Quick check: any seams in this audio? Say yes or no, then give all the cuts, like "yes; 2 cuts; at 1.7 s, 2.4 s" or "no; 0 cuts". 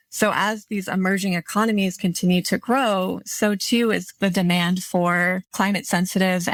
no; 0 cuts